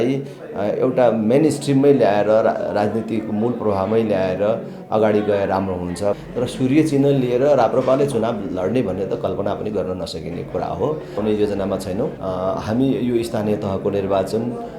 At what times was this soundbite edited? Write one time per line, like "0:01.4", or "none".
0:06.2
0:11.2
0:12.2